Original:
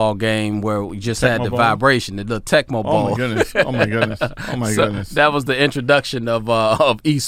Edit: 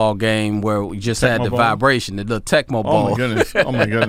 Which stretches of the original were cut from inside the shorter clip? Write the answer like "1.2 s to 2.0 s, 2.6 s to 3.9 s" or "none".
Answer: none